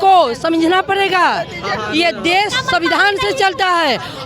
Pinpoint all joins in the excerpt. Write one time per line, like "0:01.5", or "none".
none